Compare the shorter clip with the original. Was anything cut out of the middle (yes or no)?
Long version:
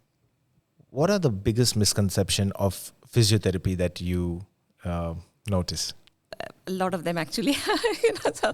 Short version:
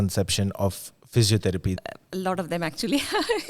yes